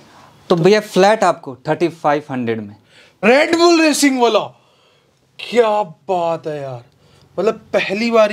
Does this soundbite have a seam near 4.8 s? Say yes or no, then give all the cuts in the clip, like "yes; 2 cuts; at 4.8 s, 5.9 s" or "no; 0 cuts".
no; 1 cut; at 3.2 s